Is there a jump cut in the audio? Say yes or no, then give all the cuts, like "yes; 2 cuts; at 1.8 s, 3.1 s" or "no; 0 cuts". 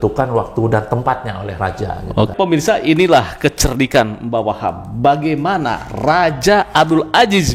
yes; 1 cut; at 2.3 s